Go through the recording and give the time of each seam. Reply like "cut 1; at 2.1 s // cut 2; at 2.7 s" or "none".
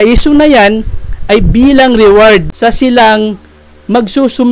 cut 1; at 2.5 s

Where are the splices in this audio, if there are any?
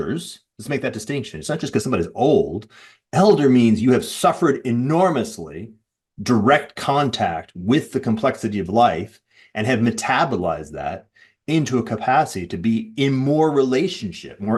none

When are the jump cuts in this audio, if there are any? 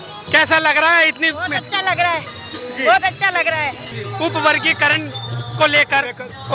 cut 1; at 3.9 s

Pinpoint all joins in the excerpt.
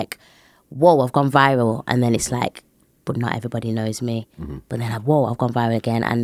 none

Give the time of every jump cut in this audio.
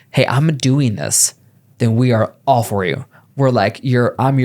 none

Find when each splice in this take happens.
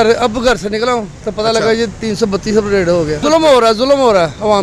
none

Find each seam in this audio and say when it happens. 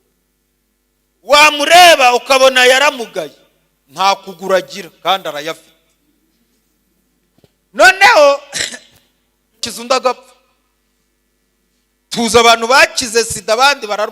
cut 1; at 9.7 s

